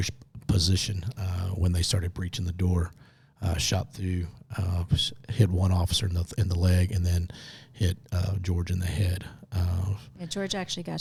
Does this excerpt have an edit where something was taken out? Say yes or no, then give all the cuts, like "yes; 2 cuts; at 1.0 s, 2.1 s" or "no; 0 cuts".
no; 0 cuts